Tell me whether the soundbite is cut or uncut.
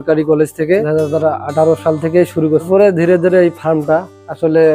cut